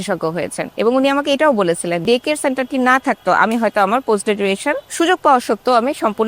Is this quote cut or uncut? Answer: cut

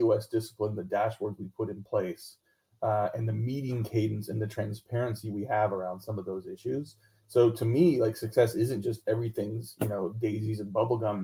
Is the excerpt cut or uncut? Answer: uncut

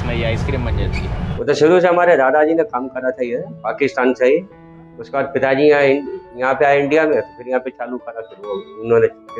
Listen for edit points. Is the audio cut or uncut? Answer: cut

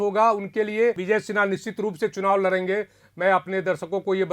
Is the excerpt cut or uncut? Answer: cut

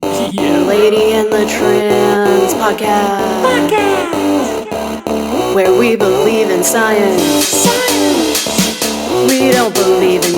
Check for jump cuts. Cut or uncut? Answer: uncut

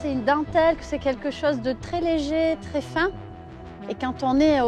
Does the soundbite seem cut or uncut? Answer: uncut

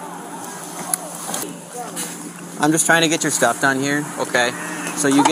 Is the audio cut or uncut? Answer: cut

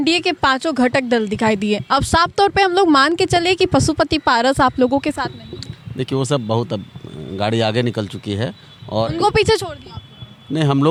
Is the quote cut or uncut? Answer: uncut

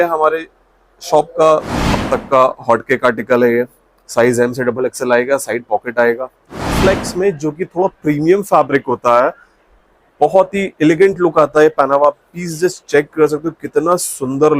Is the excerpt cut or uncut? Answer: cut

